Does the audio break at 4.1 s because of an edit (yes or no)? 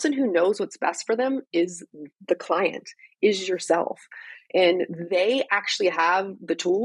no